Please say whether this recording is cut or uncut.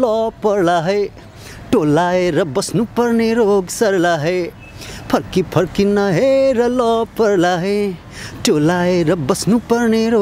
uncut